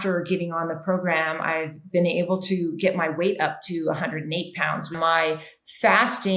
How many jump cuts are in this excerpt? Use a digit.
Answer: 1